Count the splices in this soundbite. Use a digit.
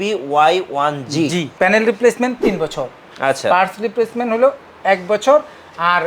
1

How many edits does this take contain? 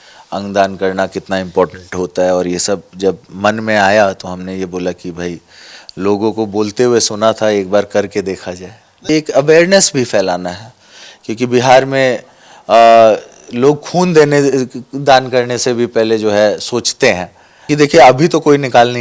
2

